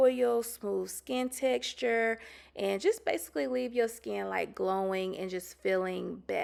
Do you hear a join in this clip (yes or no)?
no